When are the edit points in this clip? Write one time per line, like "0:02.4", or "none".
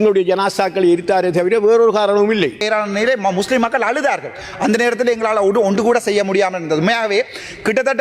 0:02.6